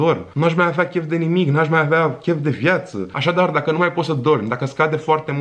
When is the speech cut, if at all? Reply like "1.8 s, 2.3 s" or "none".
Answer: none